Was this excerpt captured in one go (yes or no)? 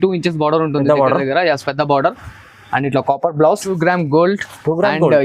no